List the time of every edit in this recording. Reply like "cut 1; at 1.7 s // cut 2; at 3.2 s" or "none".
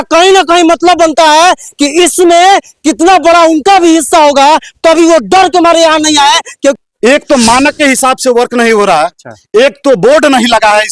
cut 1; at 6.4 s